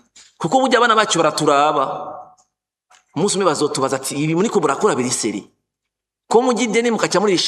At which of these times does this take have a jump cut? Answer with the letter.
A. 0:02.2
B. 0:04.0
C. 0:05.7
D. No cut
D